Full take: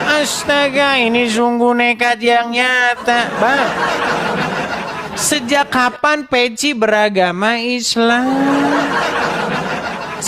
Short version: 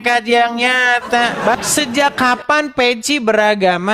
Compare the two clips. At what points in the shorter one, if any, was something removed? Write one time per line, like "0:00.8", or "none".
0:01.6